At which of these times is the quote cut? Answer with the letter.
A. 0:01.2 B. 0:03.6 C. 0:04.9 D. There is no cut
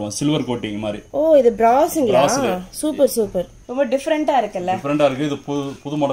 B